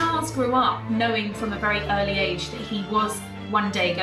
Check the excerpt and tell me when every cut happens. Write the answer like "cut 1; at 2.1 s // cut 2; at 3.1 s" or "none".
none